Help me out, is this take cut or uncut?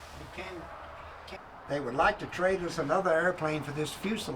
cut